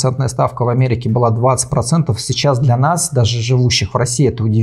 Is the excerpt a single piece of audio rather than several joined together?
yes; 0 cuts

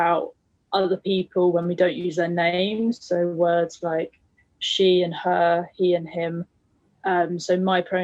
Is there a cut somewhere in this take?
no; 0 cuts

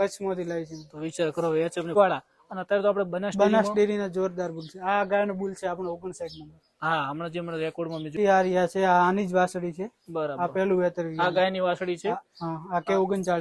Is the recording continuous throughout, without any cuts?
no; 2 cuts; at 2.0 s, 8.1 s

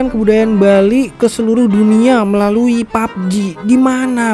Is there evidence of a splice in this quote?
no; 0 cuts

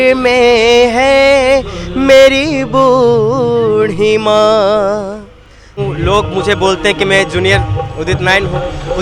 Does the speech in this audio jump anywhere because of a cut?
yes; 1 cut; at 5.8 s

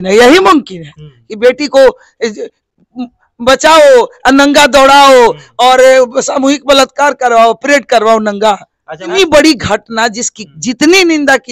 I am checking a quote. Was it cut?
yes; 1 cut; at 9.1 s

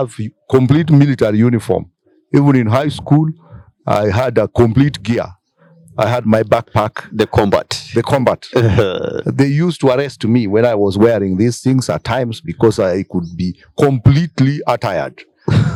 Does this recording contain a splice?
no; 0 cuts

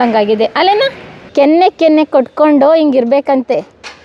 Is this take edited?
yes; 1 cut; at 1.2 s

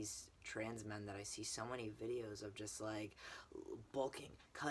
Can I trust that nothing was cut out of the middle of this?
yes; 0 cuts

